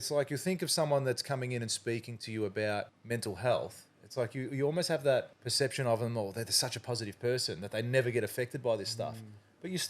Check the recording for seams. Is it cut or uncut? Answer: cut